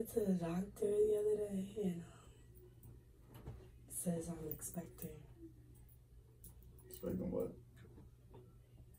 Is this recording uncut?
yes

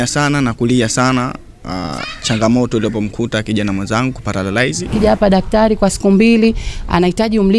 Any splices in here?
yes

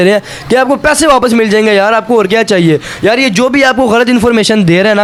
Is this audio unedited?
yes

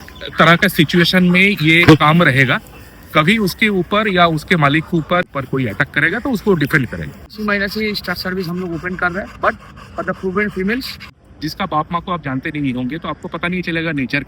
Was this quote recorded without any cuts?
no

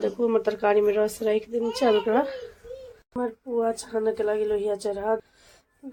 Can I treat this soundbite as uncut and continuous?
yes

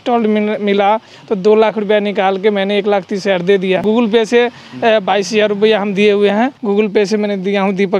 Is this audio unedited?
no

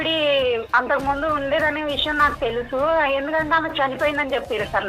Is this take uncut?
yes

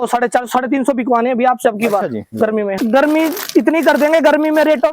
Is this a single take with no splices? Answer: no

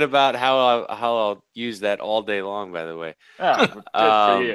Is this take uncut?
yes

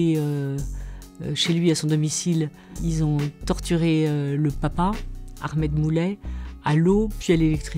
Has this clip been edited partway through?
yes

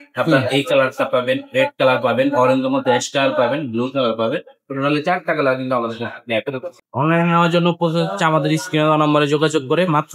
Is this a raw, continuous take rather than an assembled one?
no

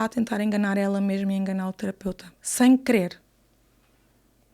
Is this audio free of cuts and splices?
yes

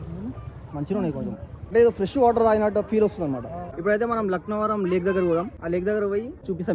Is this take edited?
yes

